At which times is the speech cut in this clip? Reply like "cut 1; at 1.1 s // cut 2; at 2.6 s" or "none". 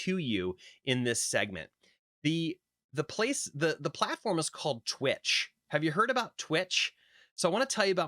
none